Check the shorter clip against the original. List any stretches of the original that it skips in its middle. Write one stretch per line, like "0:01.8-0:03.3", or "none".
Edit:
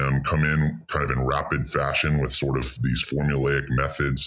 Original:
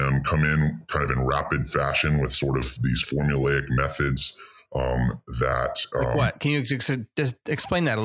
none